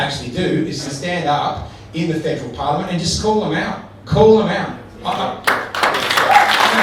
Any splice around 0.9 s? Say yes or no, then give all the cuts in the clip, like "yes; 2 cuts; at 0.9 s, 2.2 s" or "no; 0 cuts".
yes; 1 cut; at 0.9 s